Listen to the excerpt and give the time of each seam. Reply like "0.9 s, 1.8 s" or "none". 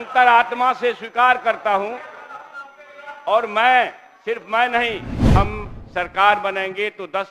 5.4 s